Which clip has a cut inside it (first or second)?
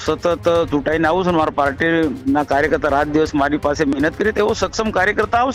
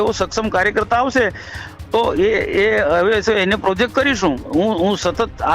second